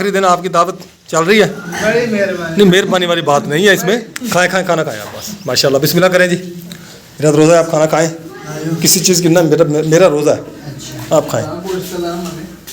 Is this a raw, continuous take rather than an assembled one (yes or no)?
no